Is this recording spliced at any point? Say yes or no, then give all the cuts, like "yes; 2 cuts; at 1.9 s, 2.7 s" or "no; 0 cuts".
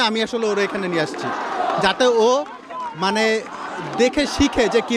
no; 0 cuts